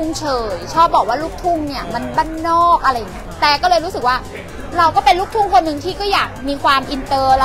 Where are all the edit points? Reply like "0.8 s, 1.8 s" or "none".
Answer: 3.3 s